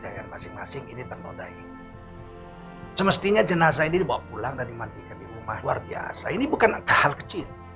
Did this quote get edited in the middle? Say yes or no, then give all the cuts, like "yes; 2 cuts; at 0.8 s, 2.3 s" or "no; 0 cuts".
yes; 1 cut; at 5.6 s